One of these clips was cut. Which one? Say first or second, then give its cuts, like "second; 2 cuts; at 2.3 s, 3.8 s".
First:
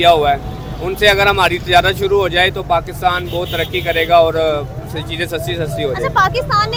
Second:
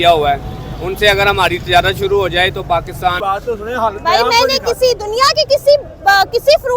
second; 1 cut; at 3.2 s